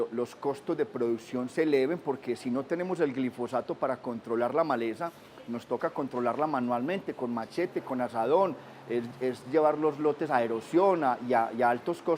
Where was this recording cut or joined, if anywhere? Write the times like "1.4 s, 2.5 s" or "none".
3.8 s